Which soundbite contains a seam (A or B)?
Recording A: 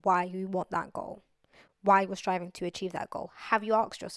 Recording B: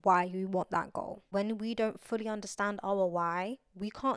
B